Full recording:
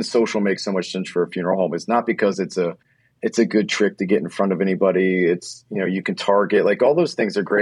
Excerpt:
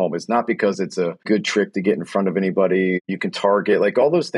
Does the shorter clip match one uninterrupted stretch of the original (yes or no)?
no